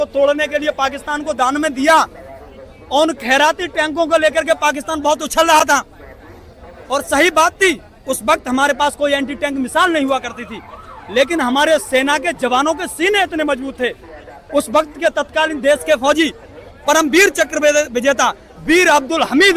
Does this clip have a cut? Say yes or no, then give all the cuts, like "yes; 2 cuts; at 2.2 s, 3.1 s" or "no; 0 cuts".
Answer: no; 0 cuts